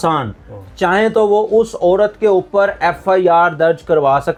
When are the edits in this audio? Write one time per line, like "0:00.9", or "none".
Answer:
none